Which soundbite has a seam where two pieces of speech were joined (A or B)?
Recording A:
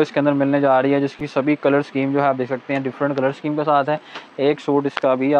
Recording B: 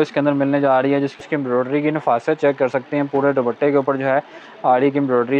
B